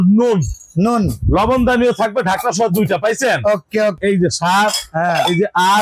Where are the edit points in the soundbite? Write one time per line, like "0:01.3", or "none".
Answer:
0:04.0